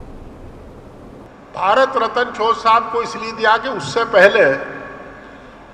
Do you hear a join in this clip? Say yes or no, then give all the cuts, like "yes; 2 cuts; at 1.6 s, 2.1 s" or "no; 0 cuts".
yes; 1 cut; at 1.3 s